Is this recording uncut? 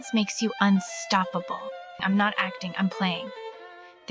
no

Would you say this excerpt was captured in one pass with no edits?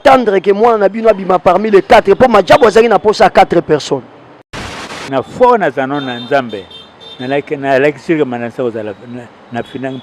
no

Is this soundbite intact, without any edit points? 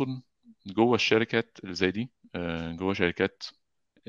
yes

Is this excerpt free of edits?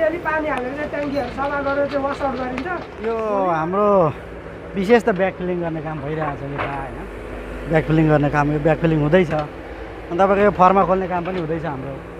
no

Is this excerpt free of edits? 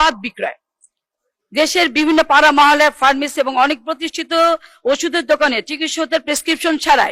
yes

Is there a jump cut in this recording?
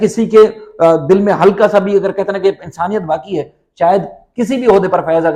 no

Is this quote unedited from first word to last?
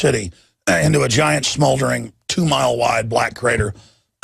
no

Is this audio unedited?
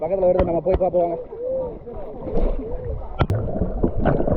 no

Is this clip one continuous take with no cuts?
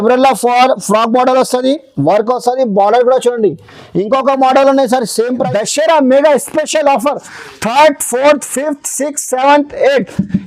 no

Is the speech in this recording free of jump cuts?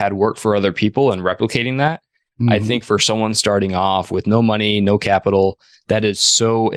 yes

